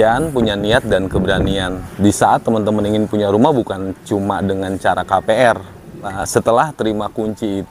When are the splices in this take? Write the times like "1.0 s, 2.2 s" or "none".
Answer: 1.8 s, 6.2 s